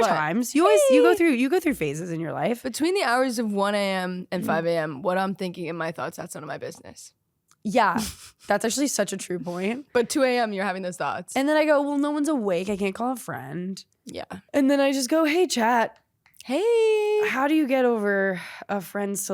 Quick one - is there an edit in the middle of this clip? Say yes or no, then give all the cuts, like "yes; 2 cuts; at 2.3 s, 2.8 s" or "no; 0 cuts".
yes; 2 cuts; at 11.3 s, 14.4 s